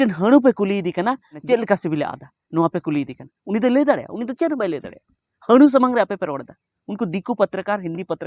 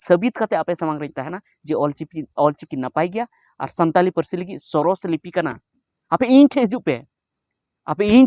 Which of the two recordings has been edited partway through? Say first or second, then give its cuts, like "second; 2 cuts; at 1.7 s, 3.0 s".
first; 1 cut; at 1.3 s